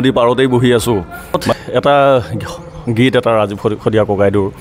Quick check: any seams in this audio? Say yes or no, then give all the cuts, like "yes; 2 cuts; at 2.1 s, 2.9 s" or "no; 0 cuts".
yes; 1 cut; at 1.5 s